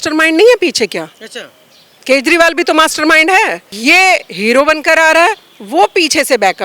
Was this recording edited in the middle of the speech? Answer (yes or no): yes